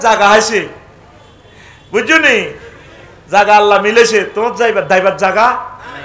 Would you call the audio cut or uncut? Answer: uncut